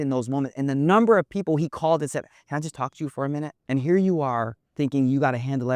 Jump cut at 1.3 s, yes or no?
no